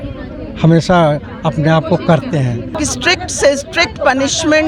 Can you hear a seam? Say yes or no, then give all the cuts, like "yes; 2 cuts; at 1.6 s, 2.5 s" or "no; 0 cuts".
yes; 1 cut; at 2.8 s